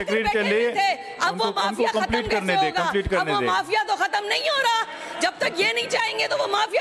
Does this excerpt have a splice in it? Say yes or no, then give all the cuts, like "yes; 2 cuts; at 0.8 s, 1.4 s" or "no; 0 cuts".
no; 0 cuts